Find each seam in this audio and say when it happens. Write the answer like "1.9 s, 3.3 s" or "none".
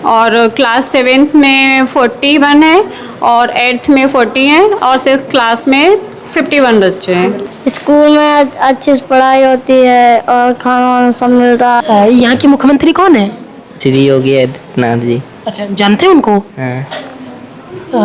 7.5 s, 11.8 s